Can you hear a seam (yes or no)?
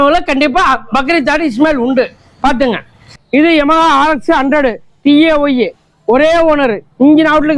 yes